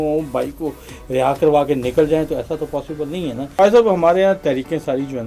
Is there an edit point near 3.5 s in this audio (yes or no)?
yes